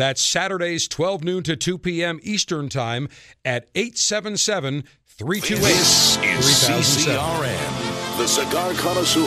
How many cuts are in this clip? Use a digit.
1